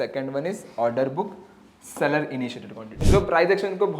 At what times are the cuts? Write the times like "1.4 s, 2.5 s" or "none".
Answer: 3.0 s